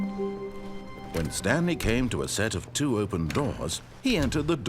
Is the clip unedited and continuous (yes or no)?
no